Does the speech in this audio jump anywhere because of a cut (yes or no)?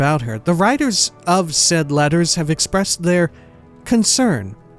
no